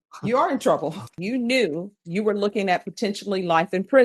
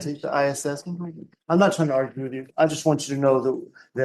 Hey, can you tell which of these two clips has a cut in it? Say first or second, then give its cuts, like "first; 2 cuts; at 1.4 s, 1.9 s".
first; 1 cut; at 1.2 s